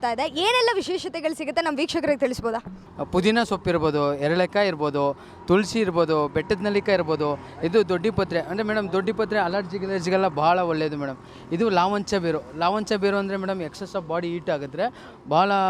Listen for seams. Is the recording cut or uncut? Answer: cut